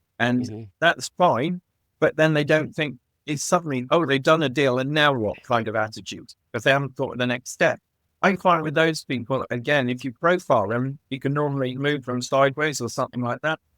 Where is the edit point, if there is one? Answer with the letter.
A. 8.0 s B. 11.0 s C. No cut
A